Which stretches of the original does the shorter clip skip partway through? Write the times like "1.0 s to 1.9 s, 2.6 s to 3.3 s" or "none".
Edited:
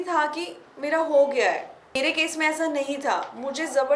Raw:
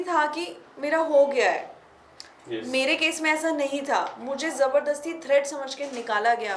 2.0 s to 2.8 s